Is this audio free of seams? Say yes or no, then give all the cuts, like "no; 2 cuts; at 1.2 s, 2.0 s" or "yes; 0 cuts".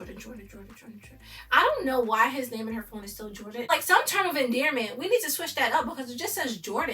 no; 1 cut; at 3.7 s